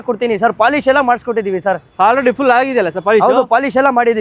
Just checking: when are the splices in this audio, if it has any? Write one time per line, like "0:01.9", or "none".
none